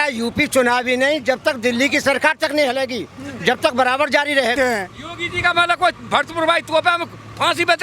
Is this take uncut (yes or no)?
no